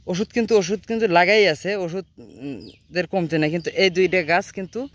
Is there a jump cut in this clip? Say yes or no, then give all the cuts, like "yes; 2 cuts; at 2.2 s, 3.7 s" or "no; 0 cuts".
no; 0 cuts